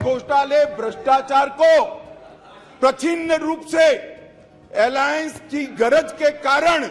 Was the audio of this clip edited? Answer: no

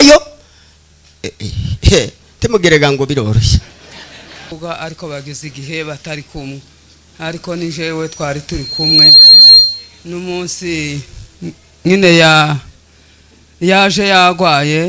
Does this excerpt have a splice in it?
yes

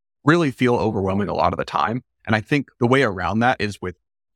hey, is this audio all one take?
no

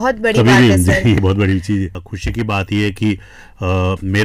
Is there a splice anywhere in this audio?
yes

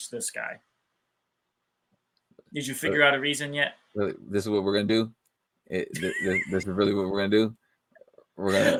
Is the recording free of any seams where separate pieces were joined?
yes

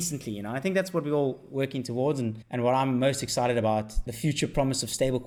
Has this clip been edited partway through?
no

